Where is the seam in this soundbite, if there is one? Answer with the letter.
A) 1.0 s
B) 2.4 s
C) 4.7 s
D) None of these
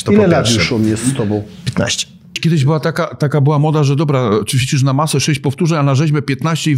B